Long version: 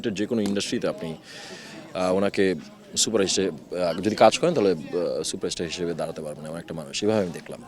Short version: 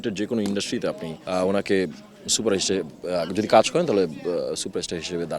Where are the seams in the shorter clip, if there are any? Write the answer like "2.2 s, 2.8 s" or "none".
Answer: 1.1 s